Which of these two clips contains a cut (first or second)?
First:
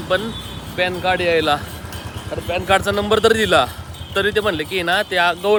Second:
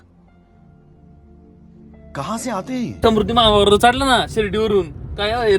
second